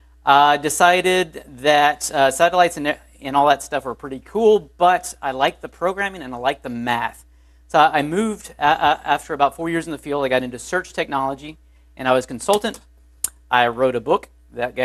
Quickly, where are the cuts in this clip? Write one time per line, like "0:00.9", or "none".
none